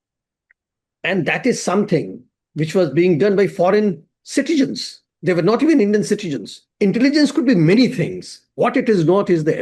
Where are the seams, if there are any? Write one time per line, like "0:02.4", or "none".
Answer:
0:06.6